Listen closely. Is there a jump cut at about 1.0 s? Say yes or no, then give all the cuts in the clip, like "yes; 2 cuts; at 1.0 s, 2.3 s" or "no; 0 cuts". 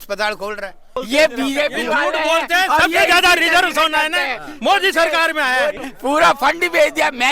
yes; 2 cuts; at 1.0 s, 5.8 s